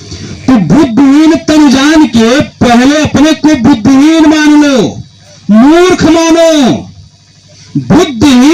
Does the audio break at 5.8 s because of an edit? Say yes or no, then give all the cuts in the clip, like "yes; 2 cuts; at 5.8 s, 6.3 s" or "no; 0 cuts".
no; 0 cuts